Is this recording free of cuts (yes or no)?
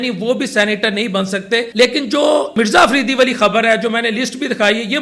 no